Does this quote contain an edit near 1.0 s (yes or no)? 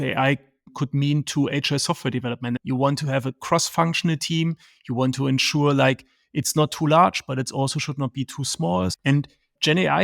no